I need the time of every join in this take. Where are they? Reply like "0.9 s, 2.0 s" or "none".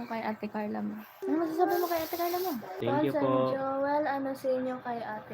1.2 s, 2.8 s